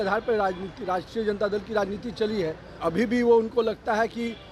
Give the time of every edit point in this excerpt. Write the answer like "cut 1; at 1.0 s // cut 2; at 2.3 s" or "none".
cut 1; at 2.8 s